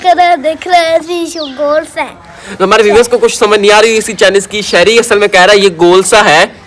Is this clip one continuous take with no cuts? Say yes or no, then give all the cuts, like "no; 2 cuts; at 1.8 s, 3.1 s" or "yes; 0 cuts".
yes; 0 cuts